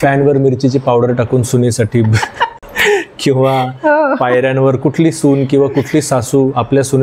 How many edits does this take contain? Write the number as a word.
one